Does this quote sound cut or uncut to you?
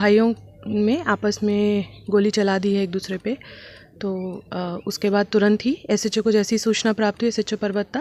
uncut